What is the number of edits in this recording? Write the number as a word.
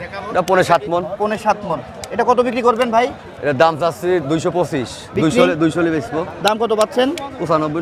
zero